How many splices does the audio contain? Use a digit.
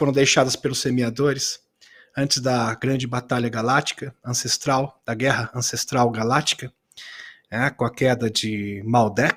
0